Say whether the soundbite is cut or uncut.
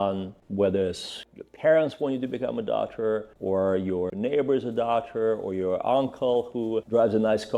uncut